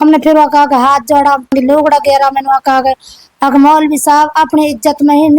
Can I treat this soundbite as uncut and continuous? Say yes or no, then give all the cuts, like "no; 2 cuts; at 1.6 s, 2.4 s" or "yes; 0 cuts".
no; 1 cut; at 1.5 s